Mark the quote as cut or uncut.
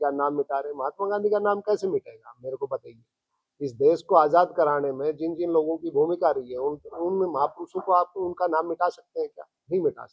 uncut